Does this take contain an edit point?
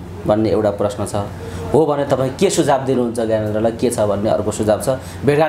no; 0 cuts

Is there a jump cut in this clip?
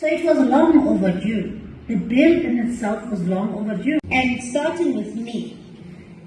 yes; 1 cut; at 4.0 s

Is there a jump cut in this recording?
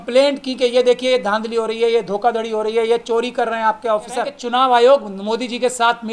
yes; 1 cut; at 4.4 s

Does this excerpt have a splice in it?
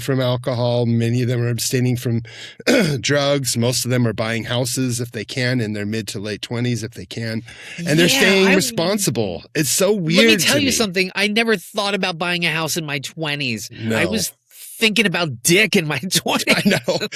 no; 0 cuts

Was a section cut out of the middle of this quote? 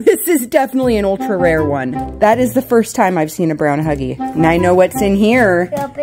yes; 2 cuts; at 2.1 s, 4.1 s

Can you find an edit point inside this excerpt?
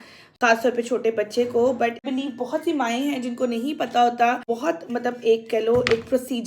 yes; 2 cuts; at 2.0 s, 4.5 s

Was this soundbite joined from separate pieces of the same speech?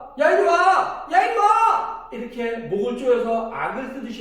no; 0 cuts

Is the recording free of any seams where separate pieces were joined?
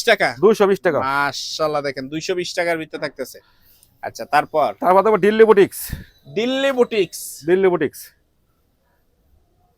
yes; 0 cuts

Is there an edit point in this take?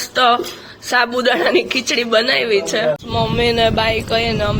yes; 1 cut; at 3.0 s

